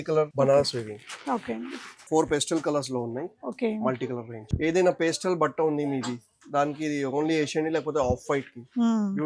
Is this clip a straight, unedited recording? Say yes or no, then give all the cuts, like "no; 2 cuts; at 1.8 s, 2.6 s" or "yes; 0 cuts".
yes; 0 cuts